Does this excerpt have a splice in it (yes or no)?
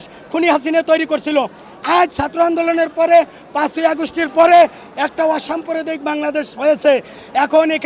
no